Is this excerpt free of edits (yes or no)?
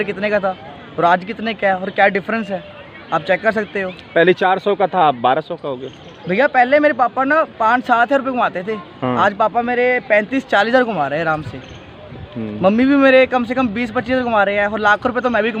yes